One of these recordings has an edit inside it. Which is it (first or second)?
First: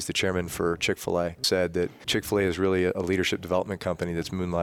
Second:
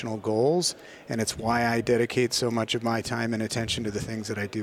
first